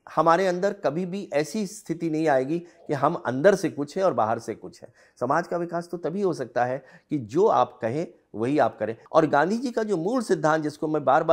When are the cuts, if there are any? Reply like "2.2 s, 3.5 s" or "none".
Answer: 9.0 s